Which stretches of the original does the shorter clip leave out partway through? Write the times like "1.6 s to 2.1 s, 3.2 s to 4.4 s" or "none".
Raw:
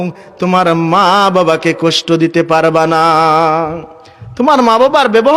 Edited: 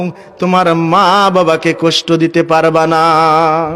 none